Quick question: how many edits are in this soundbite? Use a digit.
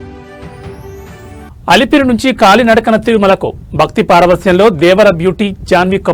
1